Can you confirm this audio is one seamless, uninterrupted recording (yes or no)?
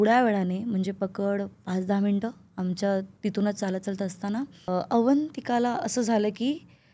no